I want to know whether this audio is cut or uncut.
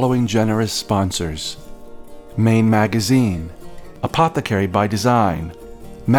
uncut